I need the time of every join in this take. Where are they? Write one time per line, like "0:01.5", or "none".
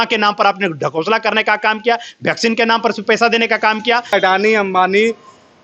0:04.1